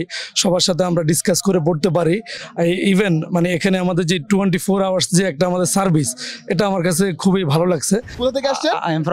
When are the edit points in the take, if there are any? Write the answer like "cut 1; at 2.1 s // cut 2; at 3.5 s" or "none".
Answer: cut 1; at 8.1 s